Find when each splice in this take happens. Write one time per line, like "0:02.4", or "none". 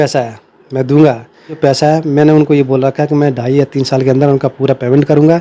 0:01.6